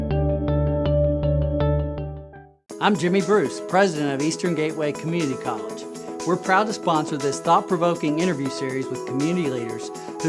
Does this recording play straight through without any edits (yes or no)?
yes